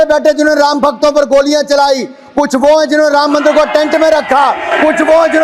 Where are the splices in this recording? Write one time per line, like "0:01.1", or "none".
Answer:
none